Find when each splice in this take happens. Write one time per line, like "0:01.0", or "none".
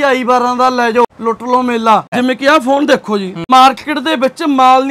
0:01.1
0:02.1
0:03.4